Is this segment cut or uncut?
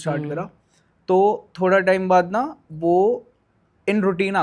uncut